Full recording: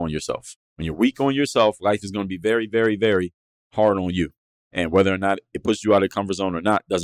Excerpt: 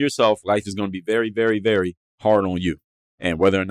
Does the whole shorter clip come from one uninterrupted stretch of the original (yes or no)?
no